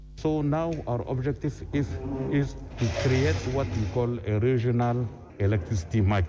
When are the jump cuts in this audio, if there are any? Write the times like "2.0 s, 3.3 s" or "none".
2.6 s, 5.2 s